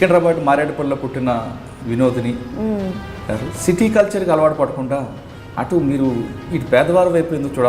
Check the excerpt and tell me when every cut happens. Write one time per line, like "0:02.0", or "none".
0:03.5